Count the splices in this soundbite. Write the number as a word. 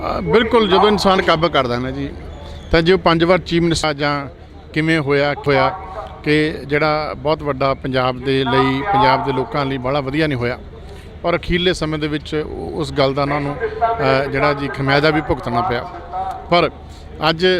two